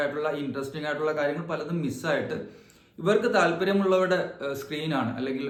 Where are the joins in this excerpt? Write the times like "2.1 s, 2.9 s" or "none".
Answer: none